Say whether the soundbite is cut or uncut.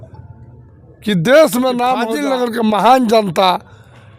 cut